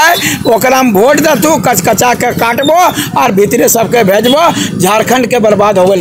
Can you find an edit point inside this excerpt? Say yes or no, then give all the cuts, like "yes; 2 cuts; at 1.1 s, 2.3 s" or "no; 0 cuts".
no; 0 cuts